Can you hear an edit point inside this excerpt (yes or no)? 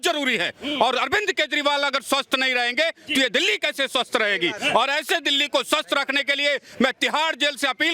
no